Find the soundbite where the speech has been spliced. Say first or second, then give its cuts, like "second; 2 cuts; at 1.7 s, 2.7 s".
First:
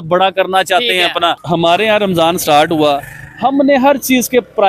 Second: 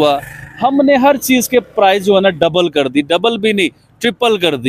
first; 1 cut; at 1.4 s